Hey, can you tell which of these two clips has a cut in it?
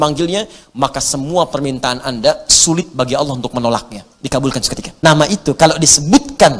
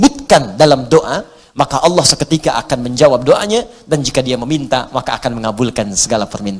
first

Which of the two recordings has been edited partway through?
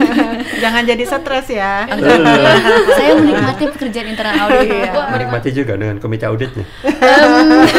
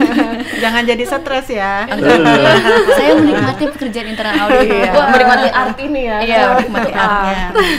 first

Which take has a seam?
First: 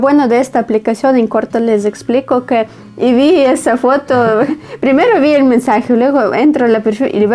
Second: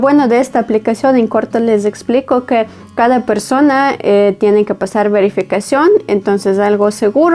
first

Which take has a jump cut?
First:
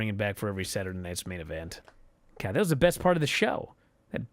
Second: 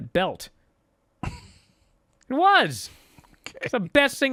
first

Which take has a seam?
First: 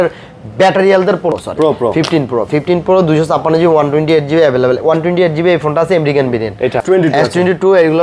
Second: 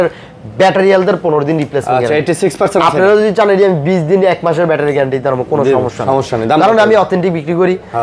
first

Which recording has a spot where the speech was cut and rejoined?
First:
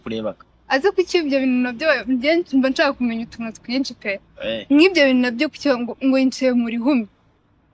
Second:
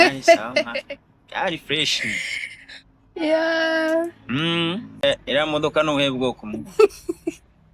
second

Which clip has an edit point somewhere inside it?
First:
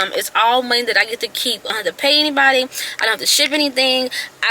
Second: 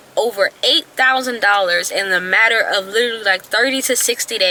first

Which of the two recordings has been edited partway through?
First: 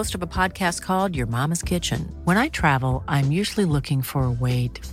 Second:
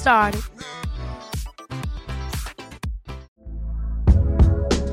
second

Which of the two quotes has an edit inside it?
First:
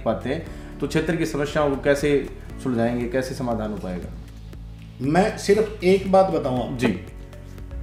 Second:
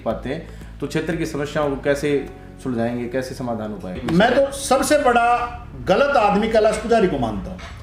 second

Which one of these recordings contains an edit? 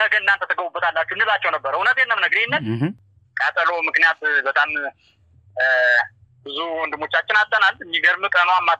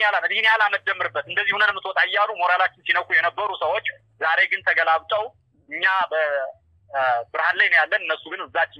first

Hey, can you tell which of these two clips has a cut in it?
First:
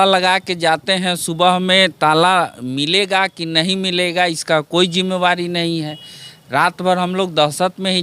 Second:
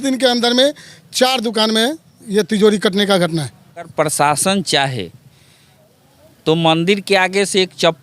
second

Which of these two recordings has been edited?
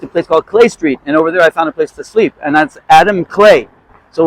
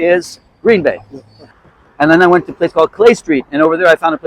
second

